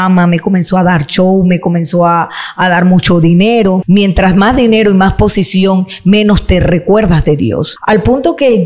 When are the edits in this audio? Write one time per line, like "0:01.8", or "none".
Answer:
0:03.8
0:07.7